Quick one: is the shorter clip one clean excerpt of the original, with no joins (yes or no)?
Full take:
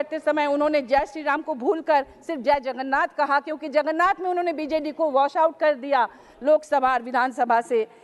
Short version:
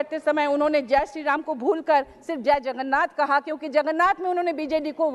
yes